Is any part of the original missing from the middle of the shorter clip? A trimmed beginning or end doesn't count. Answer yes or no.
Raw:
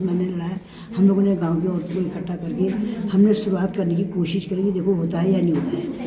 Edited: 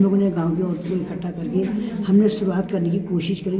no